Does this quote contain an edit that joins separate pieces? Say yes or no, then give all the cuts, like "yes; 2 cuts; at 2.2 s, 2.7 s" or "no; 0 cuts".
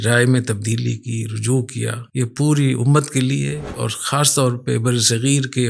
yes; 1 cut; at 2.0 s